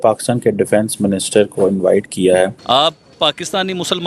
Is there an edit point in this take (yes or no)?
yes